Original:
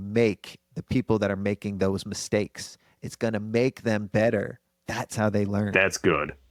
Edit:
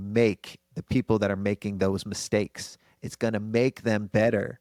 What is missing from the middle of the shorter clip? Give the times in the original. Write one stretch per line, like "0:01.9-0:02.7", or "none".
none